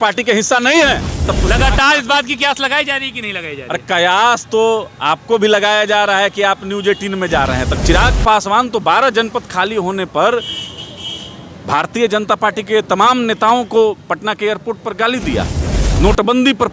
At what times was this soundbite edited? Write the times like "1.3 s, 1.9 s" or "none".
1.2 s, 7.7 s